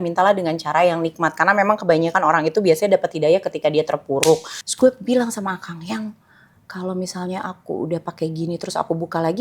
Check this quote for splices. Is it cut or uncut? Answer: cut